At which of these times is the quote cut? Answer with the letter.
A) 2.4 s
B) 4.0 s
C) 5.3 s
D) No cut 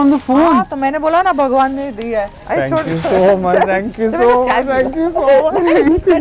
A